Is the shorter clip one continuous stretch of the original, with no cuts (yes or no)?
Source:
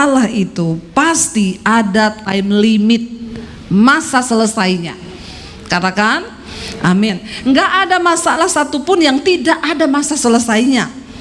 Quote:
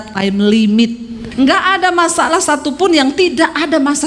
no